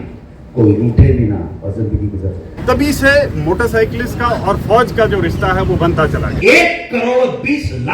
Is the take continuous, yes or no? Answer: no